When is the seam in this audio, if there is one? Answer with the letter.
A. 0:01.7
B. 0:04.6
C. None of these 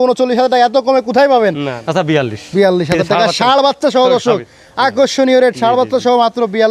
A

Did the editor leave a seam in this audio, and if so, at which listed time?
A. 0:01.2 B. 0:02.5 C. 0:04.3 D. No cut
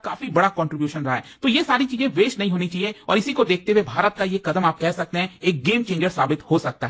D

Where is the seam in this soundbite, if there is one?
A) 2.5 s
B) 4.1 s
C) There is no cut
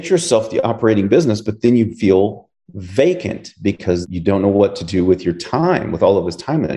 B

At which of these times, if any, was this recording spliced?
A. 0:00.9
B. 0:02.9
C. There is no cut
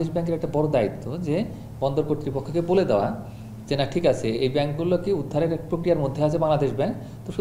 C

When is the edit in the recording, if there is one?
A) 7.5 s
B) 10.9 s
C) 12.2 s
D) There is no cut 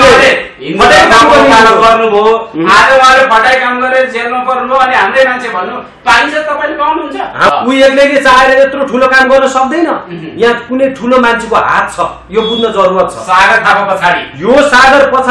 A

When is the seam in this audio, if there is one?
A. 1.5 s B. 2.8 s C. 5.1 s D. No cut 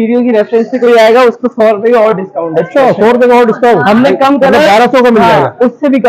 D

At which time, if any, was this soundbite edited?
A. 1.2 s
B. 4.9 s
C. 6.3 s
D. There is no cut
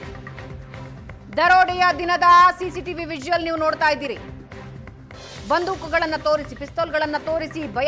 A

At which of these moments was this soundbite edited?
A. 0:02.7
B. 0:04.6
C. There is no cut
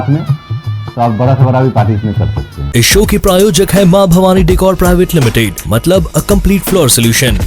C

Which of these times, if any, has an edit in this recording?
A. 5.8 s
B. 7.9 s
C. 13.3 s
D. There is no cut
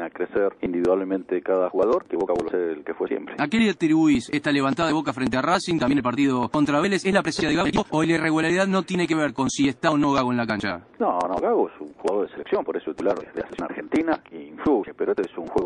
B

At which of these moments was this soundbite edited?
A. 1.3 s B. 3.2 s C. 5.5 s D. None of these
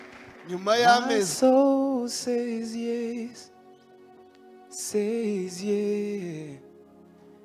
A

